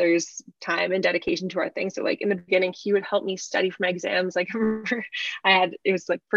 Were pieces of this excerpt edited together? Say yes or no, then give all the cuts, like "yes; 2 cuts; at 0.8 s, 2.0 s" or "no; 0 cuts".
no; 0 cuts